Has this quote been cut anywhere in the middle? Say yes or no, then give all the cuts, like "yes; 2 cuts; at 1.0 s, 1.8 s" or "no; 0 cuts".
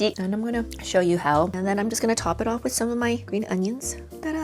yes; 1 cut; at 1.6 s